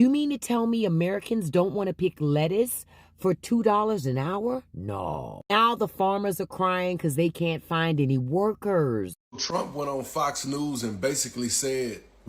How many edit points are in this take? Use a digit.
1